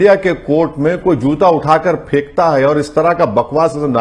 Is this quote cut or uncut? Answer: uncut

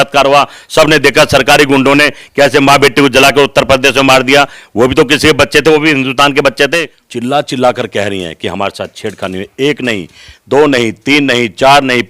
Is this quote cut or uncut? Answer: cut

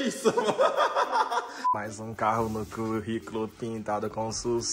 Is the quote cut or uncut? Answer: cut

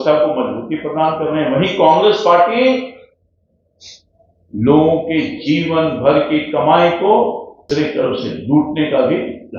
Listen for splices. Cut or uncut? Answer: cut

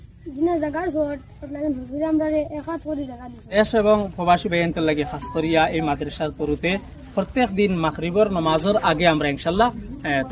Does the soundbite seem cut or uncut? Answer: cut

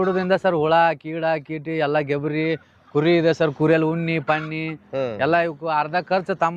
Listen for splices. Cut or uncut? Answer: uncut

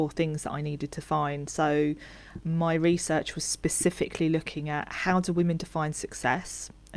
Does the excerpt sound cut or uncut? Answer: uncut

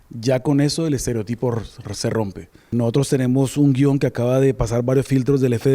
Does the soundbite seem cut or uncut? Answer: cut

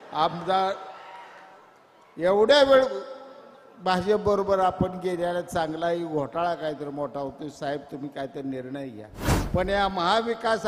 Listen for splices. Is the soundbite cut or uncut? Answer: cut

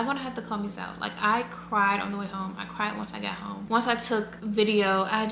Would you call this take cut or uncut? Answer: uncut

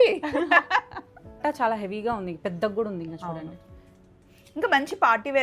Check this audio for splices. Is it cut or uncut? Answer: cut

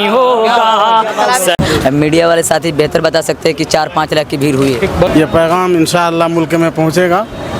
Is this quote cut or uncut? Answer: cut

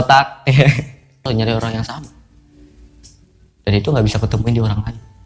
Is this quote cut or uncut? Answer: cut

